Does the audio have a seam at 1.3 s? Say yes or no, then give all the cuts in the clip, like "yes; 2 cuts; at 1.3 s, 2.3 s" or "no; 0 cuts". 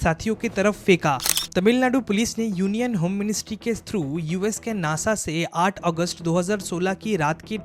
yes; 1 cut; at 1.3 s